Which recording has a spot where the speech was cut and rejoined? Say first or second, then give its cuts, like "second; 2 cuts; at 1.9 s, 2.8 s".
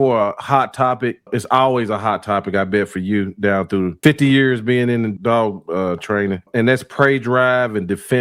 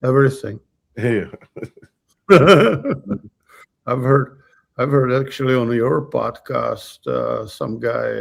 first; 4 cuts; at 1.3 s, 3.9 s, 5.1 s, 6.5 s